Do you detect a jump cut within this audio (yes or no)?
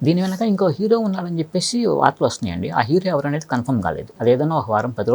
yes